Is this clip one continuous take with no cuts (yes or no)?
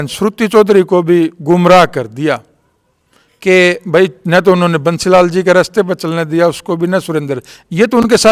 yes